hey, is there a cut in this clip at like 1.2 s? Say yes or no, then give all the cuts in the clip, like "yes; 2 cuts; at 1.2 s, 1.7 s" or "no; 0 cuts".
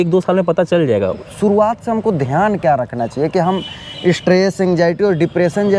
yes; 1 cut; at 1.2 s